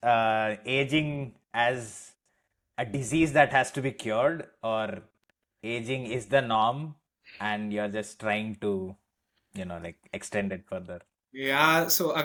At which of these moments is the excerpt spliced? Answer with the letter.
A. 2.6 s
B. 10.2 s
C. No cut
C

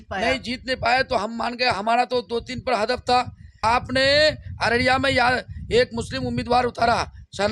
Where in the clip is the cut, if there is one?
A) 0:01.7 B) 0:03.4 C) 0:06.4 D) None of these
B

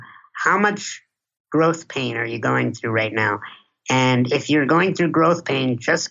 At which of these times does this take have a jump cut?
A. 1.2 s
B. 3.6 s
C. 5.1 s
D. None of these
D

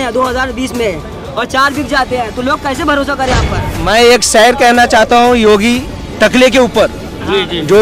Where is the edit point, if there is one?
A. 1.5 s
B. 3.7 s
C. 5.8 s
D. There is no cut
B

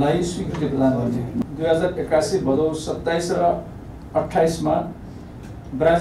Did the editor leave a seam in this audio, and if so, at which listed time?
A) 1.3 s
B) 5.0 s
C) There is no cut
A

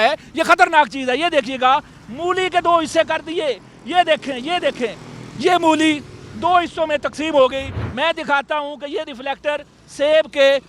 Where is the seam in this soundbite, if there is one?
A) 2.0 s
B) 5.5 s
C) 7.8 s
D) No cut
C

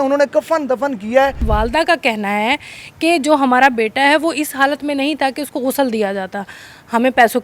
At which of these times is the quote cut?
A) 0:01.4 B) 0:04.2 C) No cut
A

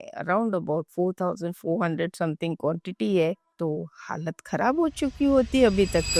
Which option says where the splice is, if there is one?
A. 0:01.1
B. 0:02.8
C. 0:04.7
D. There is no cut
D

